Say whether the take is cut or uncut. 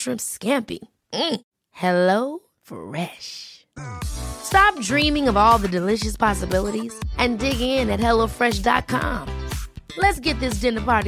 uncut